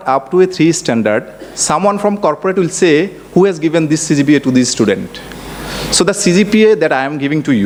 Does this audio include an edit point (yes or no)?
no